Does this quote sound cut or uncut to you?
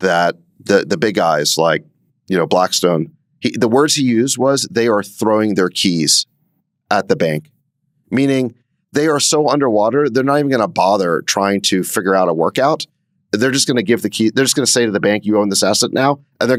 uncut